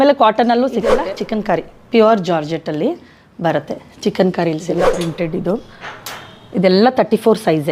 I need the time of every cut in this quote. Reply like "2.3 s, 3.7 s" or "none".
1.1 s, 4.9 s